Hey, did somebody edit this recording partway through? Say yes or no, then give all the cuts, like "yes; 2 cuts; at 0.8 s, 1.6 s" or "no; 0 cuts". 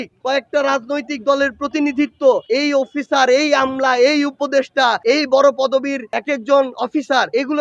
no; 0 cuts